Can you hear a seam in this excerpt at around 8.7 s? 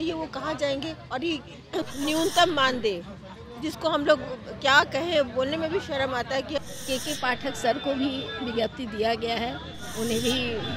no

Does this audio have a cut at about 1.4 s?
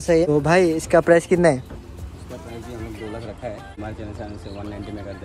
no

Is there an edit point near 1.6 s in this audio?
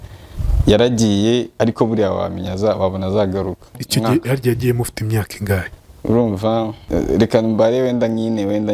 no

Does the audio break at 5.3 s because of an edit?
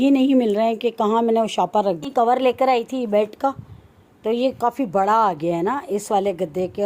no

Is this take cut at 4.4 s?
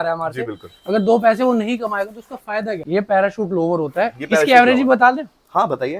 no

